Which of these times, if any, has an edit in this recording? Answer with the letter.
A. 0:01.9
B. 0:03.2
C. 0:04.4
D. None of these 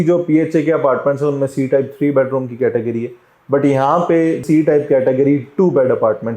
C